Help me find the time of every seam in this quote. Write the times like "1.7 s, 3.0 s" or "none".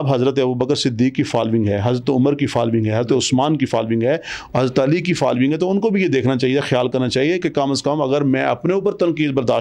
none